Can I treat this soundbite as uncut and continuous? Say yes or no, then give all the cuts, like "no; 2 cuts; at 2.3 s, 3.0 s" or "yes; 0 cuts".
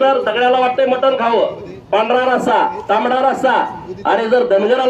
yes; 0 cuts